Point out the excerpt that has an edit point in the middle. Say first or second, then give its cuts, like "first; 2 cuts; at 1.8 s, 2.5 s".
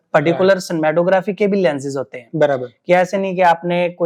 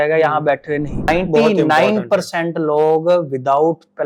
second; 1 cut; at 1.1 s